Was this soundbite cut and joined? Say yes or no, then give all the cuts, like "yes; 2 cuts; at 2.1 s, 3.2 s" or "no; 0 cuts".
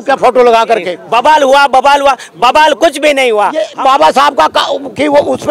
yes; 2 cuts; at 1.0 s, 3.7 s